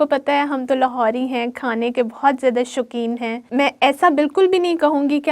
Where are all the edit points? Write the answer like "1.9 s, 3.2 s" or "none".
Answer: 3.5 s